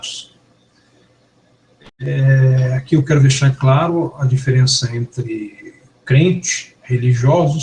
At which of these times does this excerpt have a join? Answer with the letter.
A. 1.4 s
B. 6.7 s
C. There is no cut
A